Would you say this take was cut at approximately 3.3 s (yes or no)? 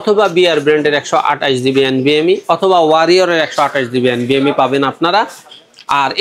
no